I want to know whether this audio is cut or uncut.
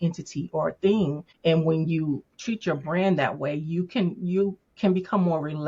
cut